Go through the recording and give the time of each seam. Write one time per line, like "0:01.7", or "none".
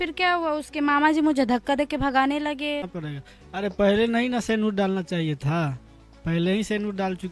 0:02.9